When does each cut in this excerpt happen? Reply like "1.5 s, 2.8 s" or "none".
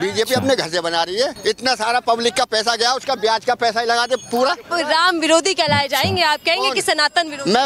1.4 s, 4.6 s